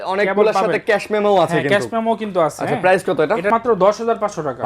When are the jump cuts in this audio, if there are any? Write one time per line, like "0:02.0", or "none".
0:03.5